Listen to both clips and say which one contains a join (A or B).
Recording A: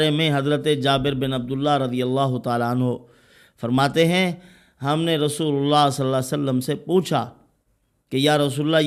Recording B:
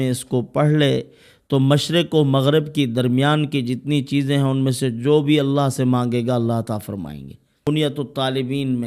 B